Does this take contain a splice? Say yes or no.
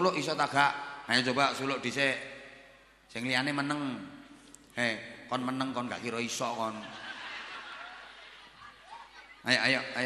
no